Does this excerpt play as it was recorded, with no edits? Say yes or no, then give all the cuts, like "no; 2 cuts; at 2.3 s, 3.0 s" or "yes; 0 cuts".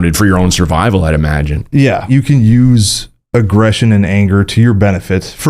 no; 1 cut; at 2.0 s